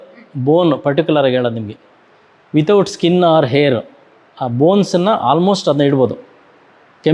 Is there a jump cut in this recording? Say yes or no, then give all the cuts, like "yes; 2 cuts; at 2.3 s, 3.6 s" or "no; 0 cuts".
no; 0 cuts